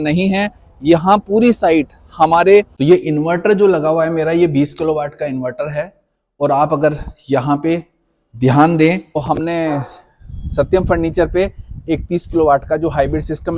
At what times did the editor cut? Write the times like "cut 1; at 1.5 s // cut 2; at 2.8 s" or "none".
cut 1; at 2.7 s // cut 2; at 9.2 s